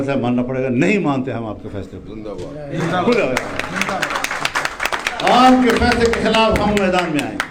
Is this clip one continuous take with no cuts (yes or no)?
yes